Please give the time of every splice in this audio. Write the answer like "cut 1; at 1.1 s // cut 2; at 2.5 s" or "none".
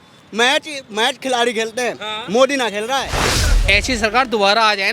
cut 1; at 3.2 s